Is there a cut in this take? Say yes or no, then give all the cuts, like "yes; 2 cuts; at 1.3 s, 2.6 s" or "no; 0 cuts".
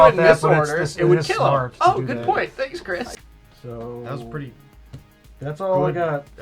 yes; 1 cut; at 3.1 s